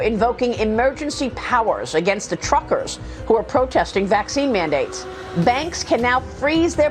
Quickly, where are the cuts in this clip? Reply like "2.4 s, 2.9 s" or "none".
none